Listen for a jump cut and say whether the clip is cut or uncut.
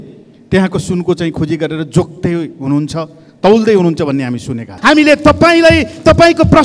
cut